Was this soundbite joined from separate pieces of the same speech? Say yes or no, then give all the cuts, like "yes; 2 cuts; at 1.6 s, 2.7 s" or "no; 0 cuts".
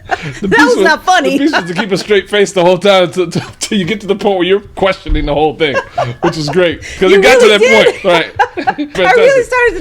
yes; 1 cut; at 8.9 s